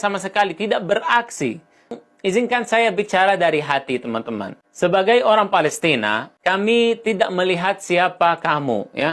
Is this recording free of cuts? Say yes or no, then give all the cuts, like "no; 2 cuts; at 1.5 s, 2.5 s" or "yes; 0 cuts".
no; 1 cut; at 1.9 s